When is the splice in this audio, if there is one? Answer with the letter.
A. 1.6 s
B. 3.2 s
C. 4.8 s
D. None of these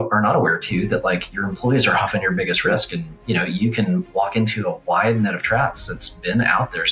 D